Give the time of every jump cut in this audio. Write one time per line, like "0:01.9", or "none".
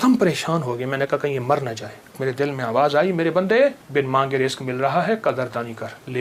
0:02.2
0:03.8